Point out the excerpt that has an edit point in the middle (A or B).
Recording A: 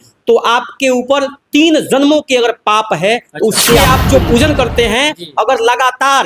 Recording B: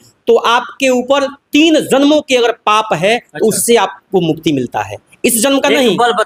A